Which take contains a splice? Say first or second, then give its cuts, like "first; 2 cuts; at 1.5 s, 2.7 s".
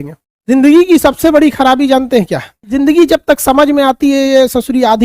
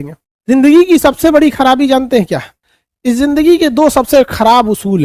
first; 1 cut; at 2.6 s